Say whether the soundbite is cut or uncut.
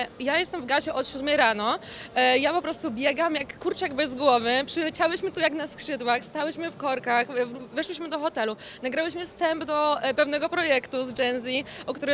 uncut